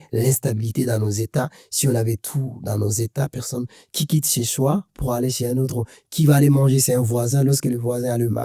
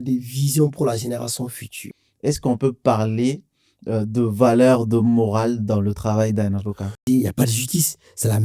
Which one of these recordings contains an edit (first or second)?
second